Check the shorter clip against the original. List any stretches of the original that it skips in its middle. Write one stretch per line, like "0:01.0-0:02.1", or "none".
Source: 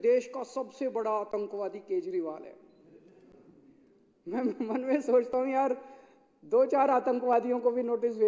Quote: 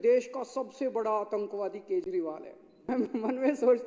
0:02.8-0:04.3